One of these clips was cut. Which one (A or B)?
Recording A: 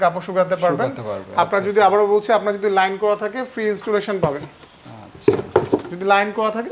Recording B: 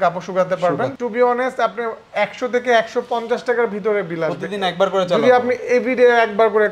B